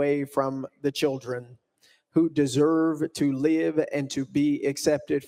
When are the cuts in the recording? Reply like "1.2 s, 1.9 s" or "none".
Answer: none